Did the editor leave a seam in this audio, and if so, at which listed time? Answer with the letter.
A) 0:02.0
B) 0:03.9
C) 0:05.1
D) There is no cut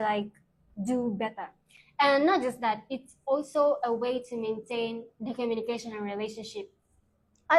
D